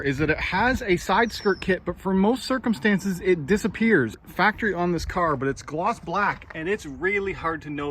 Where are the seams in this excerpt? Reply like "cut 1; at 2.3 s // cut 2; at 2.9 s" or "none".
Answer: none